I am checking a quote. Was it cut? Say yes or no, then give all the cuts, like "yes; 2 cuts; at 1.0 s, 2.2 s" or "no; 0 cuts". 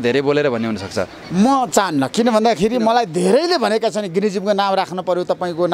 no; 0 cuts